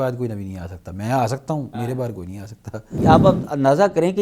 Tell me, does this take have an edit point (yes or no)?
yes